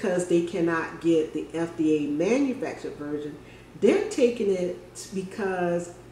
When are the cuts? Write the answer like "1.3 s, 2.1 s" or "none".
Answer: none